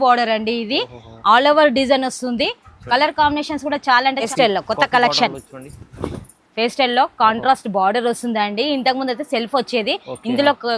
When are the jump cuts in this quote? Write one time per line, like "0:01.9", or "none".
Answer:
0:04.3